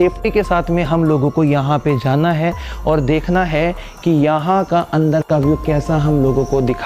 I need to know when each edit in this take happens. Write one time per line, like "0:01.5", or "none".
none